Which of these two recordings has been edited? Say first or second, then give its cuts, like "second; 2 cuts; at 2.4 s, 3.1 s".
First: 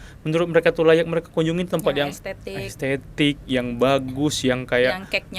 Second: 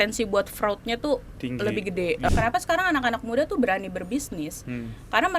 second; 1 cut; at 2.3 s